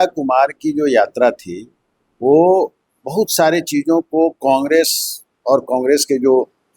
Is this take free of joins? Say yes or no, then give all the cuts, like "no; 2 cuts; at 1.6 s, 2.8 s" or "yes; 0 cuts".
yes; 0 cuts